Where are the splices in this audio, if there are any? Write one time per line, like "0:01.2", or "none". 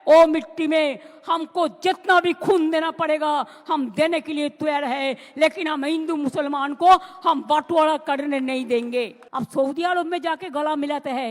0:09.2